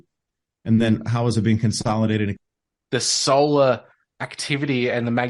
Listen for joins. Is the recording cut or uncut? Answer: cut